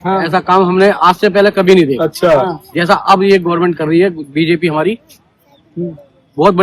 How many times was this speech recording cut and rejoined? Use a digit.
0